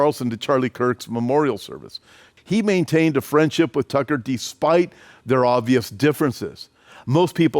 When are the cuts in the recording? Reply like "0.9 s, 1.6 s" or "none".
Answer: 2.3 s